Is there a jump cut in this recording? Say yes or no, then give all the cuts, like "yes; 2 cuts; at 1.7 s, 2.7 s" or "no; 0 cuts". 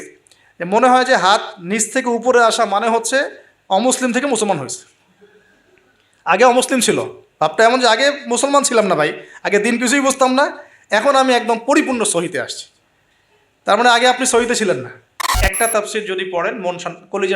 yes; 1 cut; at 15.4 s